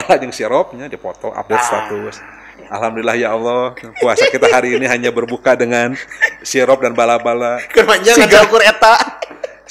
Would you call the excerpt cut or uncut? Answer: uncut